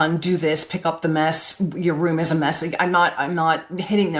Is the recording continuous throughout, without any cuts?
yes; 0 cuts

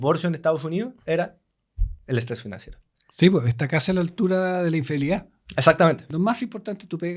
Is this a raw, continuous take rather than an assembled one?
no; 1 cut; at 6.1 s

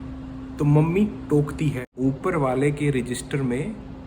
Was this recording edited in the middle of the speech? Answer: yes; 1 cut; at 1.9 s

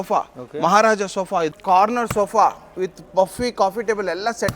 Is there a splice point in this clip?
yes; 1 cut; at 1.6 s

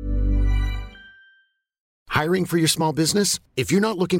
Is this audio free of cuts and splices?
no; 1 cut; at 1.9 s

